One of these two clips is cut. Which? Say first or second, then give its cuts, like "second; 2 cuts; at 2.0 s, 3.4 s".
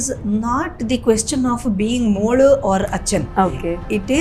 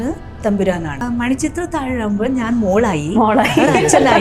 second; 1 cut; at 1.0 s